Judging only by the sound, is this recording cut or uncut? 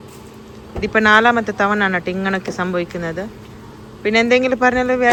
uncut